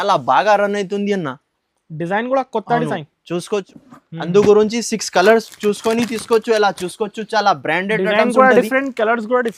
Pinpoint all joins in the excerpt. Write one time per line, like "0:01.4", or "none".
0:03.7